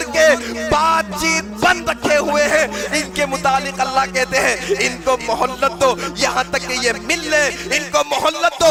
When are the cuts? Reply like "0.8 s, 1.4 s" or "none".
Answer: none